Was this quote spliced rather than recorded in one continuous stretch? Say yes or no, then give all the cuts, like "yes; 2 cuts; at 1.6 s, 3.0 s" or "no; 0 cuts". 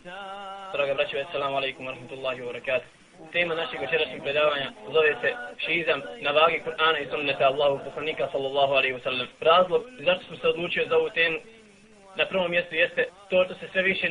no; 0 cuts